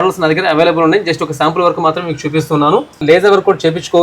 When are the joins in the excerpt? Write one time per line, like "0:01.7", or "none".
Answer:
0:03.0